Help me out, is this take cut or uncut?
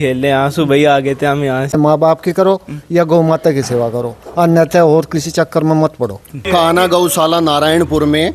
cut